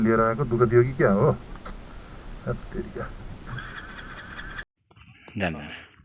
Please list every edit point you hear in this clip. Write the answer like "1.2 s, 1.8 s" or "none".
4.6 s